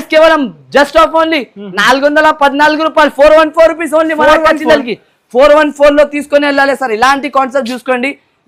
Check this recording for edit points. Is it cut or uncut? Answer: uncut